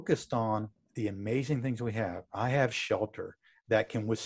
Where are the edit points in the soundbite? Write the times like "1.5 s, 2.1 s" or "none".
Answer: none